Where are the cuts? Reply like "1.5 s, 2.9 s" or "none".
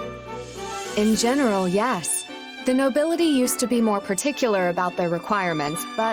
0.9 s